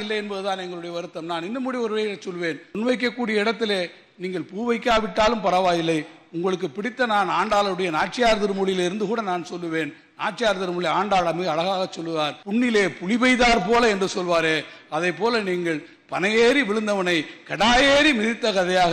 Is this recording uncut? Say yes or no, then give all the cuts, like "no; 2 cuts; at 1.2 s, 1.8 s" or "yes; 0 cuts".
no; 2 cuts; at 2.7 s, 12.4 s